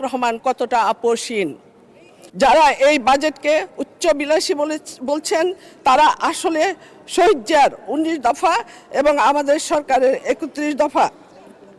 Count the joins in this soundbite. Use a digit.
1